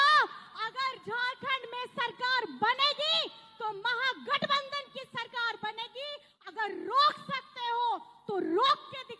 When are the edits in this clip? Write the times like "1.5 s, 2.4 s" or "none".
6.3 s